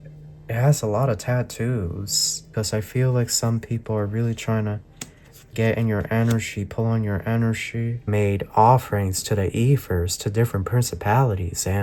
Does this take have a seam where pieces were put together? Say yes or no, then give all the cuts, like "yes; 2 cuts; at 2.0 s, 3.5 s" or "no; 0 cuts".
yes; 2 cuts; at 2.5 s, 8.1 s